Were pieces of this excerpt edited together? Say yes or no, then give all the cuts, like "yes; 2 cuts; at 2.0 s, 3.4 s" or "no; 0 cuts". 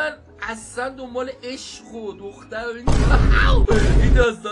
no; 0 cuts